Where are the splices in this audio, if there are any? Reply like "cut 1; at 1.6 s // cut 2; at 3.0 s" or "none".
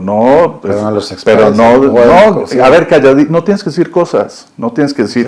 none